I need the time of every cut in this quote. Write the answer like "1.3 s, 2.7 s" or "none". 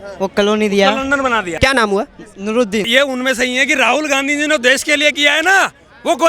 1.5 s, 2.9 s